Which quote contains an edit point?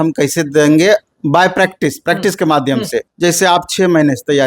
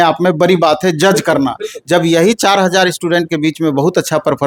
first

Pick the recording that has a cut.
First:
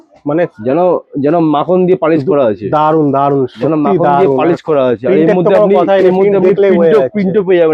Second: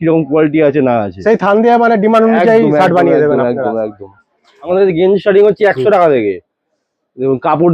second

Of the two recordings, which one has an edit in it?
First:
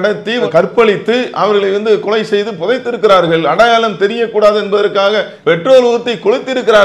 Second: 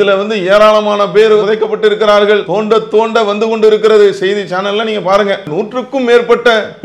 second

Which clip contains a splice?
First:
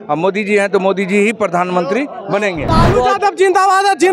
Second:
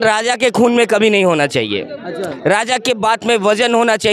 first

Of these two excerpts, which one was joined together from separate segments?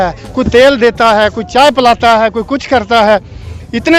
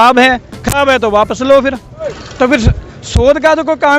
second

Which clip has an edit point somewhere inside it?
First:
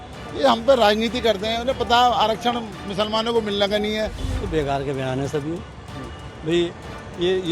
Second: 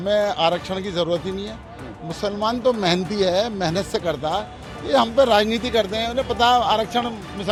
first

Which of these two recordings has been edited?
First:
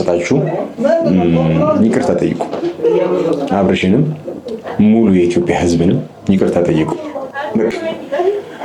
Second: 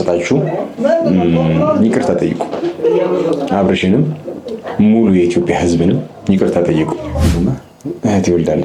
second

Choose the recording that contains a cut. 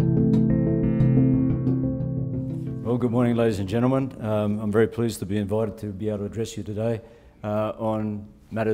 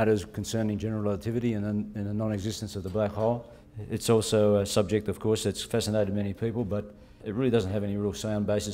second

